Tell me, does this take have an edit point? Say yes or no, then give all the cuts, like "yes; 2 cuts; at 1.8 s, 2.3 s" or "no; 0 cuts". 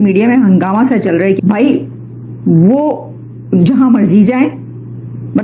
yes; 1 cut; at 1.4 s